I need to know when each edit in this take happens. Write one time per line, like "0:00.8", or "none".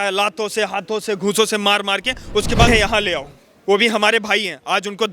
0:02.7